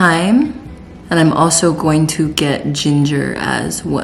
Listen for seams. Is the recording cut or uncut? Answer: uncut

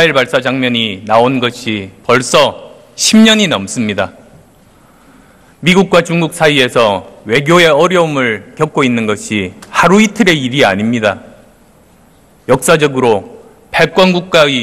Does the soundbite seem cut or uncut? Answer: cut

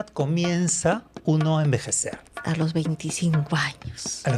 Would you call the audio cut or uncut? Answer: uncut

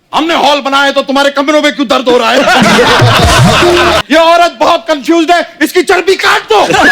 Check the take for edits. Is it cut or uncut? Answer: cut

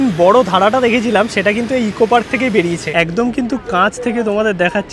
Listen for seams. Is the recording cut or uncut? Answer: cut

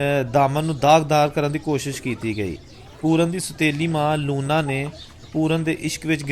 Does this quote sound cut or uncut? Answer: uncut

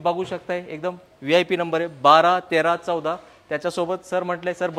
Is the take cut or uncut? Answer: uncut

